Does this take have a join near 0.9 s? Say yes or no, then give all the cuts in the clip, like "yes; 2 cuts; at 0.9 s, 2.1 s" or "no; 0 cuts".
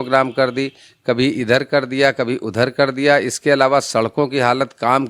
no; 0 cuts